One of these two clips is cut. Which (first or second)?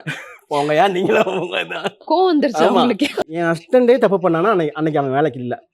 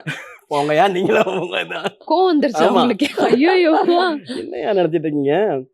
first